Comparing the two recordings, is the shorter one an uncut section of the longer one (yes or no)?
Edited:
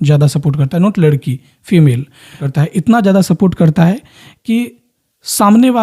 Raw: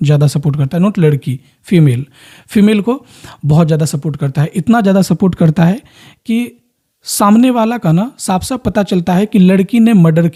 no